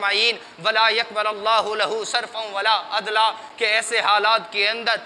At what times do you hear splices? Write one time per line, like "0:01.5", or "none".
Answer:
none

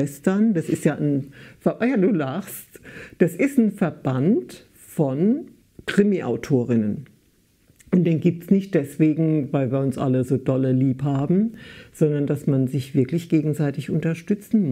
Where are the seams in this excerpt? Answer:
none

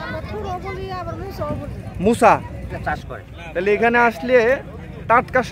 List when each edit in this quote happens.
0:02.7

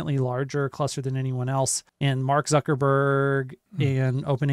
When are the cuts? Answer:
0:01.8
0:03.6

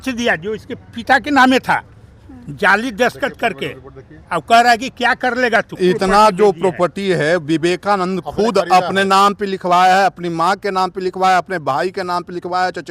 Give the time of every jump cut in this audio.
0:05.7

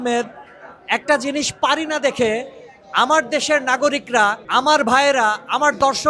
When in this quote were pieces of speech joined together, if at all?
0:04.4

